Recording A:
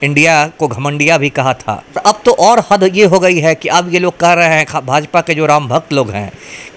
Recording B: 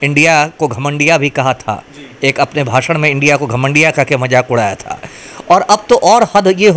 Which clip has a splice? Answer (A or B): A